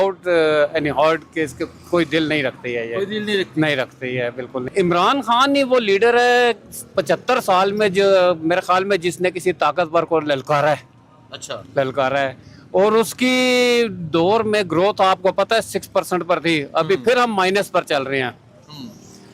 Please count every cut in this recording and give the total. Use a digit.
1